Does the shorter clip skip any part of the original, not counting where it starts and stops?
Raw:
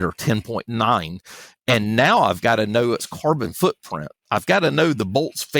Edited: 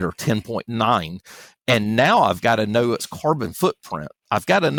no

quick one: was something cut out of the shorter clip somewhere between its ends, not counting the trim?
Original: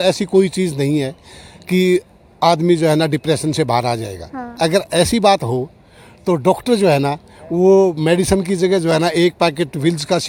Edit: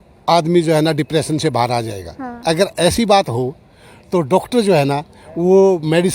no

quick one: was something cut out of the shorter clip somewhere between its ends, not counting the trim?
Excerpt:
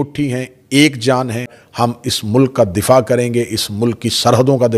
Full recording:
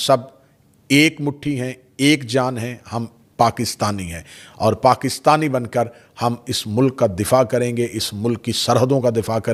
yes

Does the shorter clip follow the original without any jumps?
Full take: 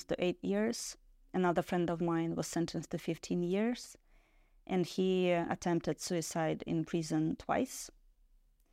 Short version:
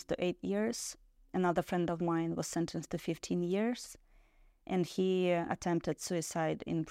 yes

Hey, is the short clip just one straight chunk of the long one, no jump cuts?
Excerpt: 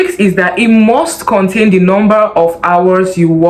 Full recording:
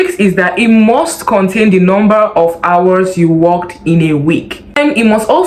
yes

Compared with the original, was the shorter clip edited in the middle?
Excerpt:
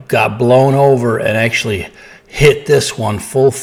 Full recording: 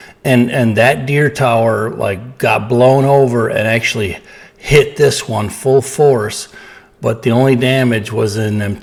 no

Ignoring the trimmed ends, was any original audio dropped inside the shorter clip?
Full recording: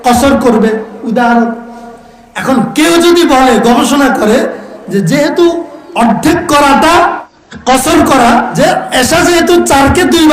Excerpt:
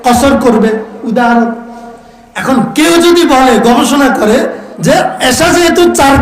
yes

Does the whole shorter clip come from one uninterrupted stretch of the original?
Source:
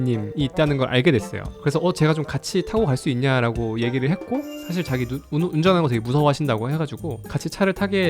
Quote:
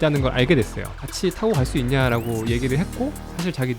no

